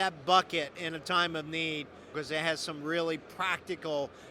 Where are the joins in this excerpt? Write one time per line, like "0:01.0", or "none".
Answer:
0:02.1